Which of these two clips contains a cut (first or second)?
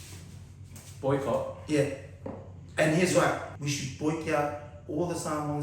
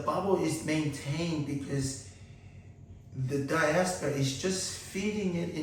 first